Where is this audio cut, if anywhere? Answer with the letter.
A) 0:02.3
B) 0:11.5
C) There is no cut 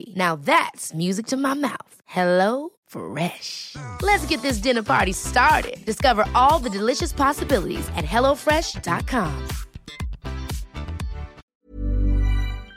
B